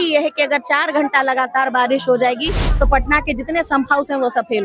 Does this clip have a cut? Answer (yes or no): no